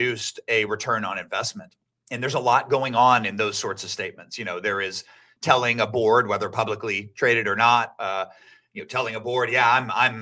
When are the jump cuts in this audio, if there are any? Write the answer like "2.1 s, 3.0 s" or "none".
none